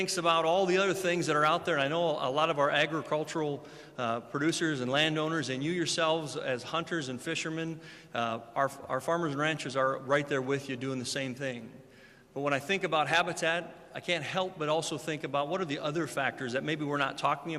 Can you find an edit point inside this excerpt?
yes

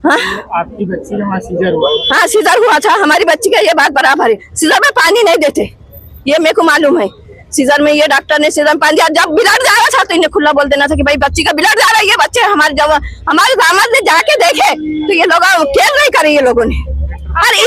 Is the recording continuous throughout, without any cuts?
yes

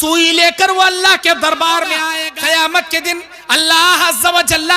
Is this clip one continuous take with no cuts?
no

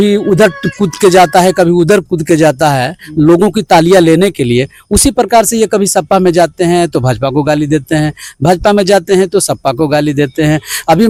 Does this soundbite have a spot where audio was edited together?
no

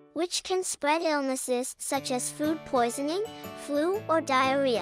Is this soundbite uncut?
yes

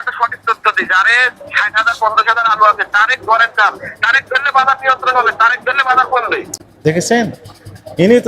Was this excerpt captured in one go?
no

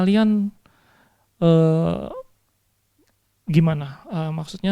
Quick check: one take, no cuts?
yes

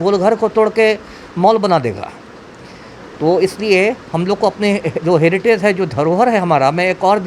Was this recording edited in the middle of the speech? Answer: no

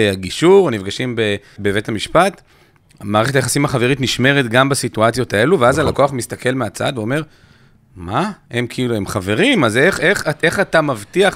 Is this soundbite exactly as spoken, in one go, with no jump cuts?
no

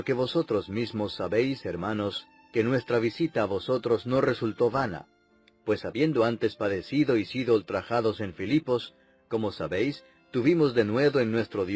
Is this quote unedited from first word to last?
yes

